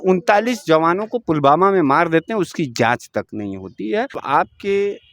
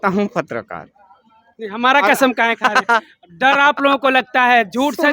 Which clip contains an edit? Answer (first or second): first